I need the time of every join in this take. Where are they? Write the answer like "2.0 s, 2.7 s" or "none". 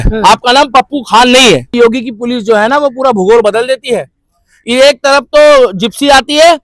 1.7 s